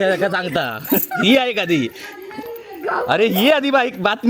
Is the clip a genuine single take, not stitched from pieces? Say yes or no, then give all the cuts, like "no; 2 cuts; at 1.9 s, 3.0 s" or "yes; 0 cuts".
yes; 0 cuts